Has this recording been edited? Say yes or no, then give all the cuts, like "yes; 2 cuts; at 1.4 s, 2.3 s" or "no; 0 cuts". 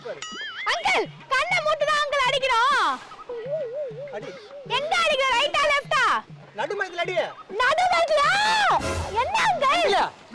no; 0 cuts